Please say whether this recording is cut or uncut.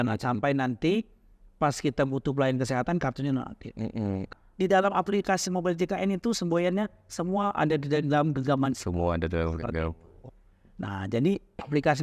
cut